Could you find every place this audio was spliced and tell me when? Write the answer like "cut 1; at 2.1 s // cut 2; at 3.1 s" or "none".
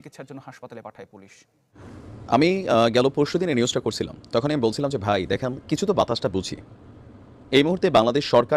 cut 1; at 2.1 s